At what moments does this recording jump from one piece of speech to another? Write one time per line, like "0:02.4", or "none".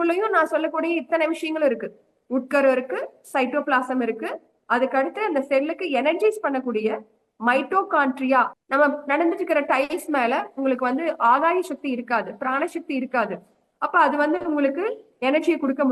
0:08.6